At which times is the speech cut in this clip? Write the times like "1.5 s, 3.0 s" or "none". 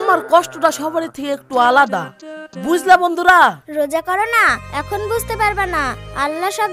3.6 s